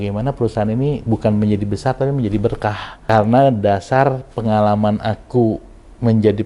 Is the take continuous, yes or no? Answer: no